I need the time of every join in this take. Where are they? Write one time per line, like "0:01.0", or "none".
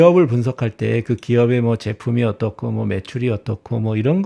none